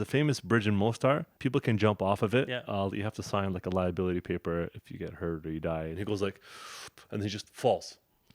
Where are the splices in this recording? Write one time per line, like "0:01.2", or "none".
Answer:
0:01.3
0:05.9